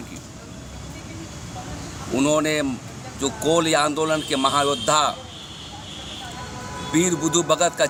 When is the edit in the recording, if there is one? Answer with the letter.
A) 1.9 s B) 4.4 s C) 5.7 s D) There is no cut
D